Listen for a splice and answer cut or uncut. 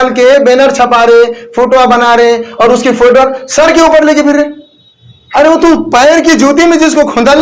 uncut